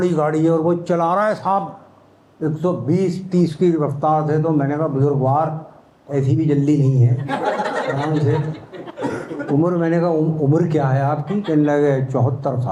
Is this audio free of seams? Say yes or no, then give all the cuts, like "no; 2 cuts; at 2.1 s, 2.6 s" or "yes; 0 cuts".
yes; 0 cuts